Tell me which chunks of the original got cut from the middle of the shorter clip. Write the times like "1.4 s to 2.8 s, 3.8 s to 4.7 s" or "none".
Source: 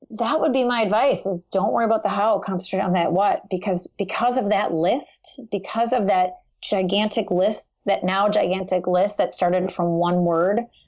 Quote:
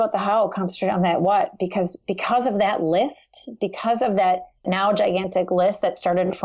6.6 s to 8.0 s